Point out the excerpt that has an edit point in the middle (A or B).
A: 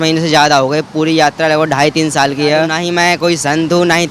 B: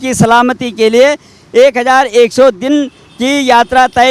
A